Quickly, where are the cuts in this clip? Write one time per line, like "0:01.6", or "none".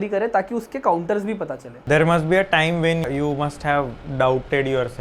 0:01.7